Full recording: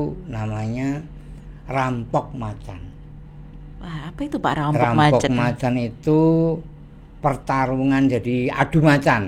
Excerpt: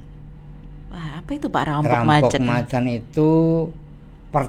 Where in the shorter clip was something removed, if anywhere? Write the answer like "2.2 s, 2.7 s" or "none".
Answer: none